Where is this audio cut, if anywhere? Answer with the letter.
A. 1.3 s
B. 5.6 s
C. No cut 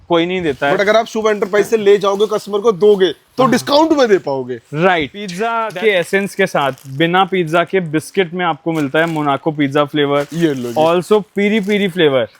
B